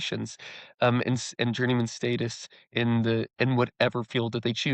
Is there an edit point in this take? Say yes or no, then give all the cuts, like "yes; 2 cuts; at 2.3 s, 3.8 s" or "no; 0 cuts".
yes; 1 cut; at 3.3 s